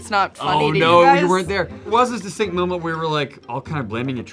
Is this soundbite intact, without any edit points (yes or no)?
no